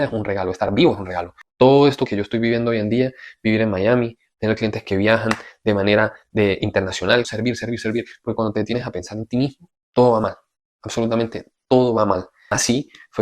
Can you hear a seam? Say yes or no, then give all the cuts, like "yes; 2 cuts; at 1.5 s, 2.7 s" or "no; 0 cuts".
yes; 3 cuts; at 1.4 s, 7.3 s, 12.4 s